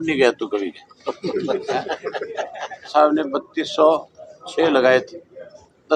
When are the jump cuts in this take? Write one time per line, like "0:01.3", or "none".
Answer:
0:02.9